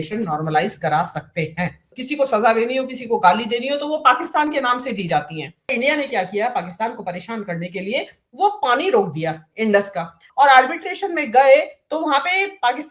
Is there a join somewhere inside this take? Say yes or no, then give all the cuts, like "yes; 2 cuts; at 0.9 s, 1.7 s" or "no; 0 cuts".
yes; 3 cuts; at 1.9 s, 5.7 s, 10.2 s